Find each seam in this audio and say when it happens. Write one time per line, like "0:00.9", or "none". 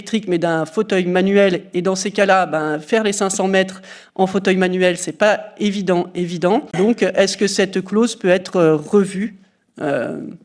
0:06.8